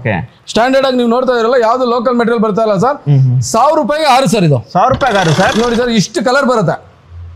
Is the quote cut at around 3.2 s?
no; 1 cut; at 5.5 s

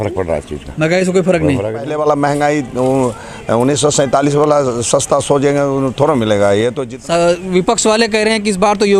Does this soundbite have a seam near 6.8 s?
yes; 2 cuts; at 1.9 s, 6.8 s

